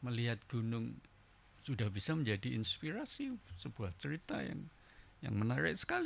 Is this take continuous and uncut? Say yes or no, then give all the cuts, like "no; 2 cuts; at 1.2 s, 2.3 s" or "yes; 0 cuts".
yes; 0 cuts